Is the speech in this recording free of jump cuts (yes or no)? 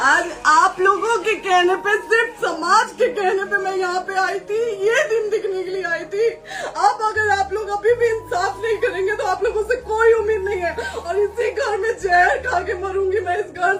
yes